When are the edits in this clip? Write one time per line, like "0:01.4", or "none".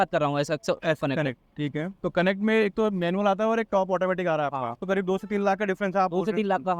0:04.8